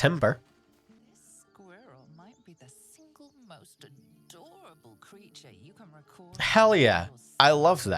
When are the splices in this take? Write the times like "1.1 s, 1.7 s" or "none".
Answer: 1.0 s

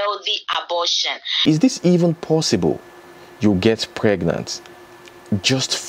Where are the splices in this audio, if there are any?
1.4 s

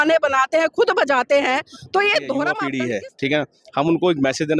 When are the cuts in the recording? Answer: 2.6 s

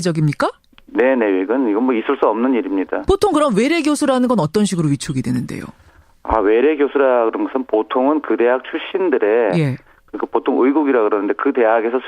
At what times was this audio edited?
4.9 s

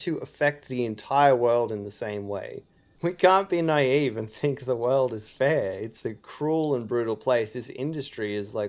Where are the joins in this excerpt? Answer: 2.9 s

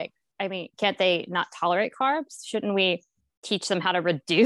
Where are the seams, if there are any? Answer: none

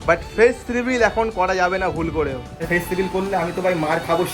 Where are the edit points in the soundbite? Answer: 2.7 s

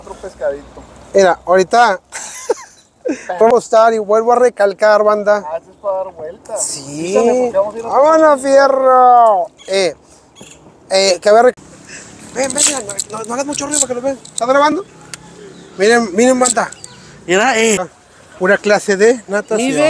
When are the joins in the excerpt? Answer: 3.5 s, 11.5 s, 17.8 s

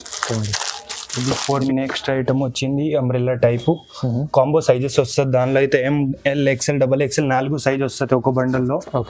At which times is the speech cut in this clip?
1.5 s

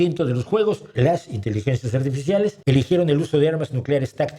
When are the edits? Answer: 0.9 s, 2.6 s

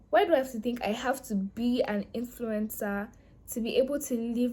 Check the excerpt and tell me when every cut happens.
none

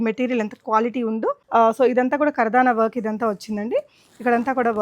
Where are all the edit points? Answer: 1.4 s

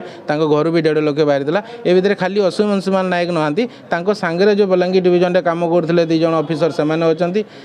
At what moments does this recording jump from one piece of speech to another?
none

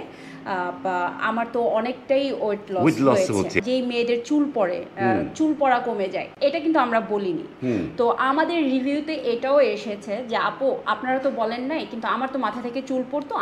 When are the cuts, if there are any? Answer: 3.6 s

